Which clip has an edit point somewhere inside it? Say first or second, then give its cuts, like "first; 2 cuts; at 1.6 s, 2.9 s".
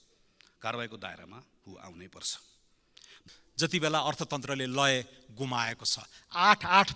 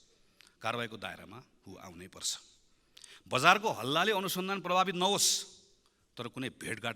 first; 1 cut; at 3.2 s